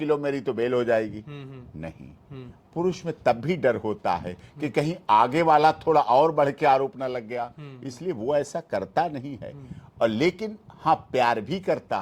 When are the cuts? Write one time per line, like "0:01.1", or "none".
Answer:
none